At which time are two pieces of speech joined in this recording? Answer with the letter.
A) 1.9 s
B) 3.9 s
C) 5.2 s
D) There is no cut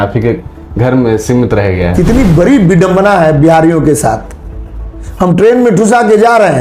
A